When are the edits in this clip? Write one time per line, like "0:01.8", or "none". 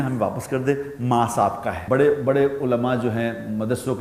0:01.8